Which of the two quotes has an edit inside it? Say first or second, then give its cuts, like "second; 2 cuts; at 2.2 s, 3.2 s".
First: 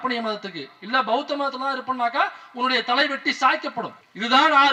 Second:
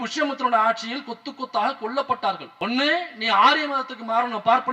second; 1 cut; at 2.5 s